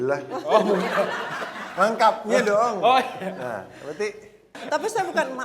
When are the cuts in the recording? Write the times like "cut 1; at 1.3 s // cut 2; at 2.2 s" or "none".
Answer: cut 1; at 4.6 s